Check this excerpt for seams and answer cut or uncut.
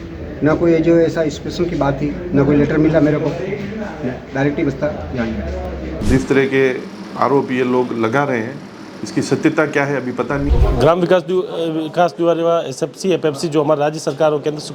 cut